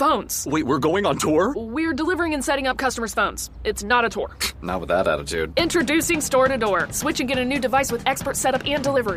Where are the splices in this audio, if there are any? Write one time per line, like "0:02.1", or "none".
none